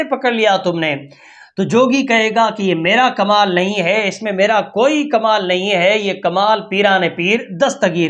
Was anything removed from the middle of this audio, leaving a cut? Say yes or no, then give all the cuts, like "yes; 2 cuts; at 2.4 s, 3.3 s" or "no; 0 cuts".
no; 0 cuts